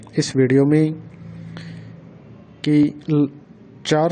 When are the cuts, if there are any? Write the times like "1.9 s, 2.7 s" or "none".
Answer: none